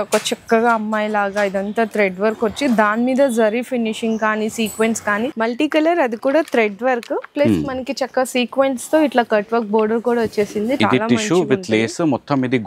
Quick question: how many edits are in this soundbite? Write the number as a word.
two